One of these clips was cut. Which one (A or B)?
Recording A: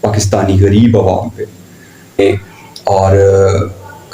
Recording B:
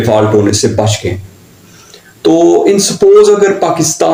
A